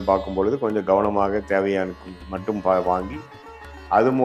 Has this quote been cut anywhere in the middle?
no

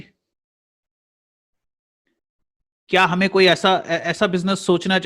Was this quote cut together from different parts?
yes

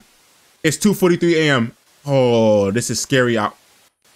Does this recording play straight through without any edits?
yes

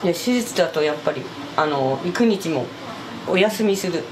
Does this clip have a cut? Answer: no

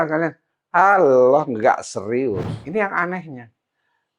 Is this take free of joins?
no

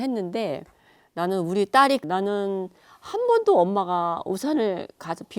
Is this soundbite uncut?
no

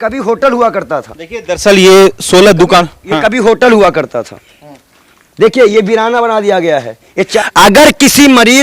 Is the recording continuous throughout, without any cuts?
no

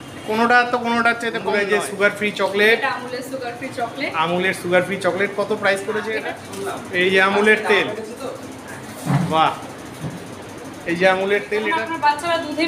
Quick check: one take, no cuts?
no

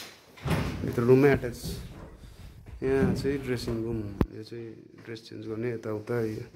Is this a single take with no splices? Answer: yes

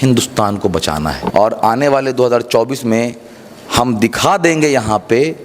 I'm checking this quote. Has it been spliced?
yes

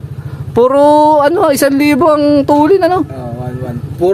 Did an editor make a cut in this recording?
no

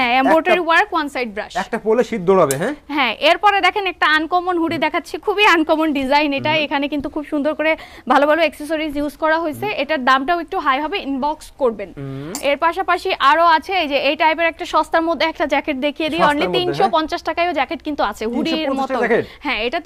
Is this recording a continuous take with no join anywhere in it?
yes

